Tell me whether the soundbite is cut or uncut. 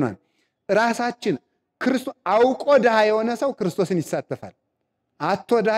uncut